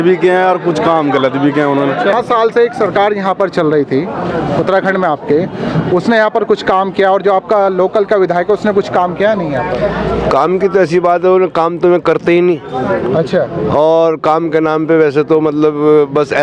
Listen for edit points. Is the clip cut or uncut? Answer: uncut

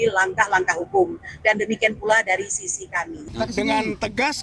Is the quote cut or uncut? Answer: cut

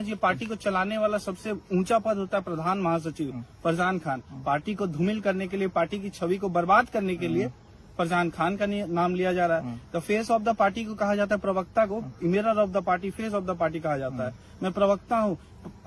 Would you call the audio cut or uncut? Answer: uncut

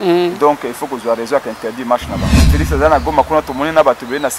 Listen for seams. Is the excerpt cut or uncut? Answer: cut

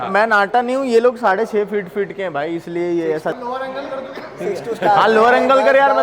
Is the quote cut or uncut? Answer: cut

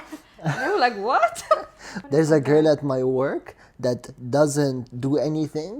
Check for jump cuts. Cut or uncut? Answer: cut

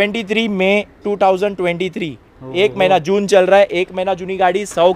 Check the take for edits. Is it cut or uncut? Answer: uncut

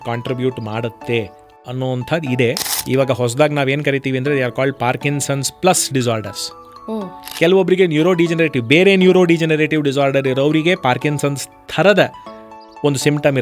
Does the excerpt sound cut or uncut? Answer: cut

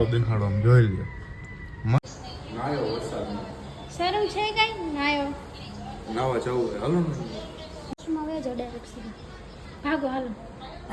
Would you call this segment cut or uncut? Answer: cut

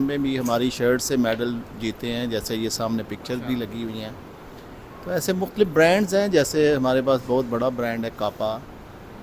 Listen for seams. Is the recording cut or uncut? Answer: uncut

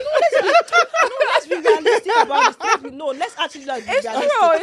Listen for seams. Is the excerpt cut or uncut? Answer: uncut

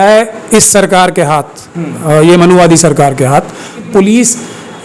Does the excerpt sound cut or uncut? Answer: cut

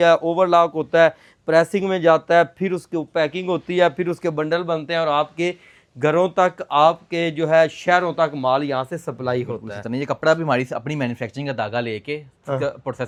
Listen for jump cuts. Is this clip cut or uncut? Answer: uncut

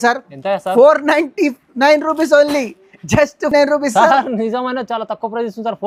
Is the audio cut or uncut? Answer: uncut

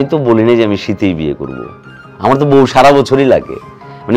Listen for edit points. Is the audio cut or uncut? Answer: uncut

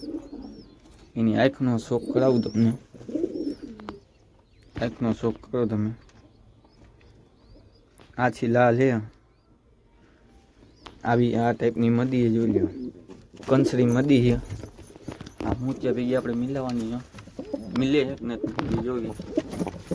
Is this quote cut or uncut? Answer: uncut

